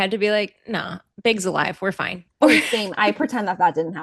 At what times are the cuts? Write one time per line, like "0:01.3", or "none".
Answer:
none